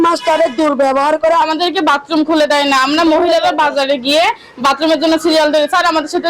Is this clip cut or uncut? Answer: cut